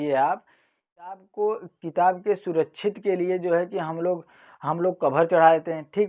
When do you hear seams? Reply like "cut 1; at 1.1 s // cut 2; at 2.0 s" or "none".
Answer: cut 1; at 1.2 s